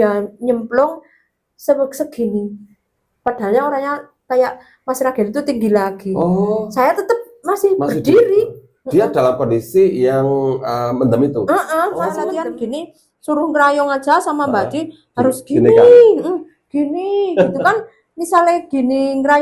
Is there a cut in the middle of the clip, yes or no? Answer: yes